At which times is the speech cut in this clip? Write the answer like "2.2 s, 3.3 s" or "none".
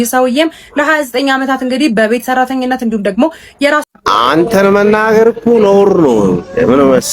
3.8 s